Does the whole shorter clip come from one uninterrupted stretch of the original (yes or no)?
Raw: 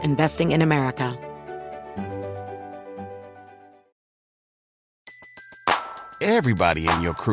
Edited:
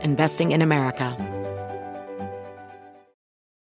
no